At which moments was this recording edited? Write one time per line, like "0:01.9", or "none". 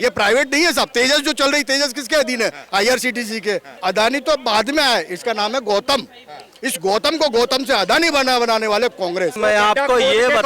0:03.7
0:09.4